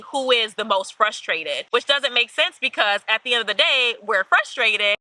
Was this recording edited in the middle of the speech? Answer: yes; 1 cut; at 1.6 s

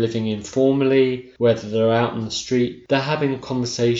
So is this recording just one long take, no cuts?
no; 2 cuts; at 1.2 s, 2.8 s

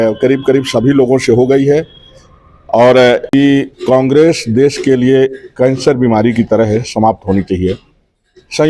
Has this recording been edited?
yes; 1 cut; at 3.3 s

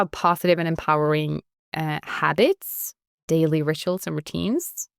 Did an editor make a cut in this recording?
no; 0 cuts

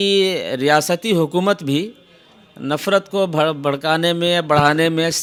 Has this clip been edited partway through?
no; 0 cuts

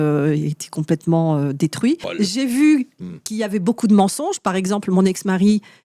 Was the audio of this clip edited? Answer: yes; 1 cut; at 2.1 s

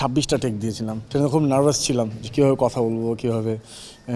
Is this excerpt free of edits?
no; 1 cut; at 1.0 s

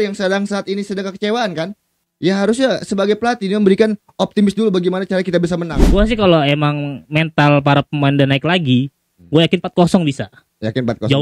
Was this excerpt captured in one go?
no; 1 cut; at 5.9 s

